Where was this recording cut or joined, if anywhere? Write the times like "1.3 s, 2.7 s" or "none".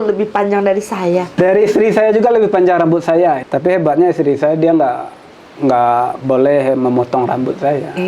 1.3 s, 3.4 s